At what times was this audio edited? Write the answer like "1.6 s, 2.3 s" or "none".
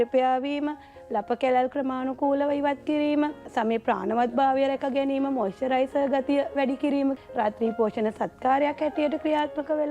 3.5 s, 7.2 s